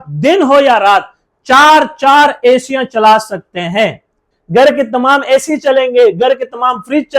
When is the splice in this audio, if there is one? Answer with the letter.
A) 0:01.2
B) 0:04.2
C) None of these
B